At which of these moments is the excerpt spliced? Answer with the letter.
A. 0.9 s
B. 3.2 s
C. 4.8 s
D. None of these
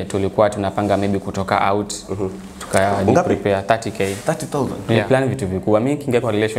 C